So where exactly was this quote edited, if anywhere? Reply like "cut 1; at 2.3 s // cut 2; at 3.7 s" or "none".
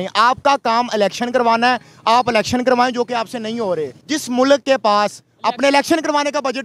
cut 1; at 4.0 s